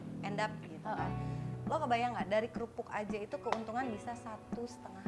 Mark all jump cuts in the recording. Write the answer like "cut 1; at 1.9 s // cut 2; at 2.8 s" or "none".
cut 1; at 1.5 s